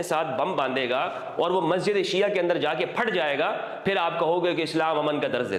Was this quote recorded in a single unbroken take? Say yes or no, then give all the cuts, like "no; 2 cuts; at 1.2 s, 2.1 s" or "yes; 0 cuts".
yes; 0 cuts